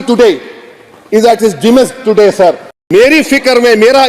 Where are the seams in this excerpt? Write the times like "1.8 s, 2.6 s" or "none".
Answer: 2.7 s